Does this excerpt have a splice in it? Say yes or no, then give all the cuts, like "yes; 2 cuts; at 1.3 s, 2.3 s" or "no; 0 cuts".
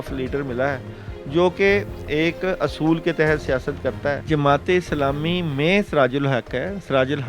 yes; 1 cut; at 4.2 s